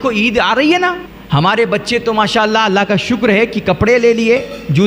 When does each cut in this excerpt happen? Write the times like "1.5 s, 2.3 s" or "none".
1.1 s